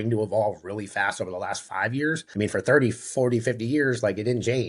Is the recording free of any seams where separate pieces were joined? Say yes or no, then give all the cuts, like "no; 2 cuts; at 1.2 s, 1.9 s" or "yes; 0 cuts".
no; 1 cut; at 2.2 s